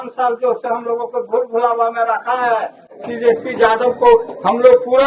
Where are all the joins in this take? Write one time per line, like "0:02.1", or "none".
0:02.9